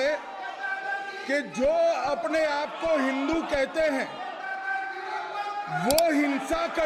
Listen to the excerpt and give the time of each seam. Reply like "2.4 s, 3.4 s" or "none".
none